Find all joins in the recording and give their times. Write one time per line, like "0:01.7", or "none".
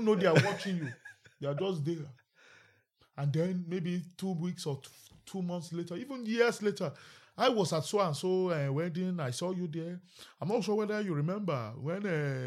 none